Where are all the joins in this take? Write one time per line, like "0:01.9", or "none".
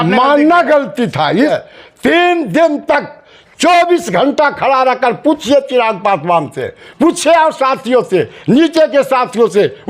0:01.5